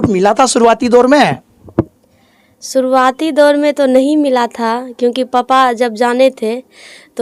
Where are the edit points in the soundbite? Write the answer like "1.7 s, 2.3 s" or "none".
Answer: none